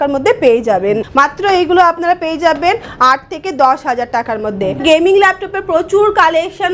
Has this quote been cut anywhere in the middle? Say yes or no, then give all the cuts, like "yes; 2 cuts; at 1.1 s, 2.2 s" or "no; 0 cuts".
yes; 2 cuts; at 1.1 s, 4.8 s